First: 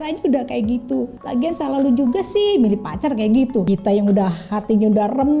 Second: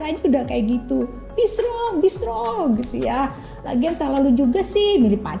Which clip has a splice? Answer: first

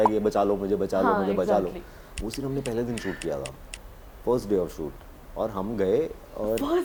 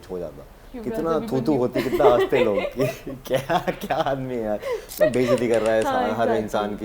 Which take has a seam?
second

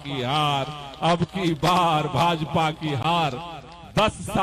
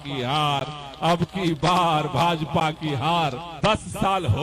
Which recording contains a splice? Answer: second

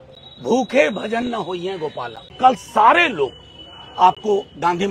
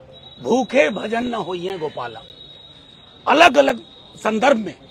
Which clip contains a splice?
first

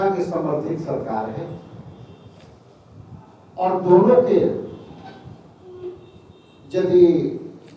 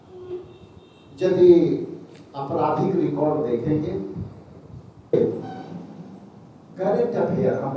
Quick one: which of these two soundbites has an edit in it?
second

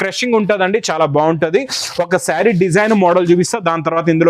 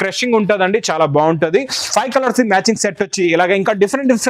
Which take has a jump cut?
second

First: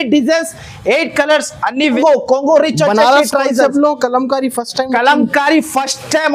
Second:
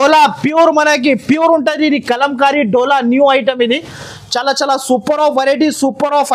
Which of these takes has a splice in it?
first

